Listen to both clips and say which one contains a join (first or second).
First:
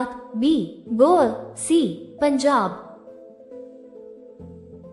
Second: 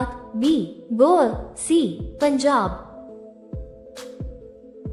first